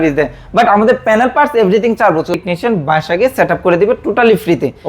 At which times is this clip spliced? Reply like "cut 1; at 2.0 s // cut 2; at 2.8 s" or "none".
cut 1; at 2.3 s